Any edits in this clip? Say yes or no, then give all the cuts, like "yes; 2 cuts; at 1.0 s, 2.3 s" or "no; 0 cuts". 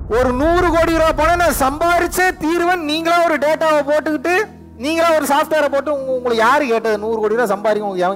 no; 0 cuts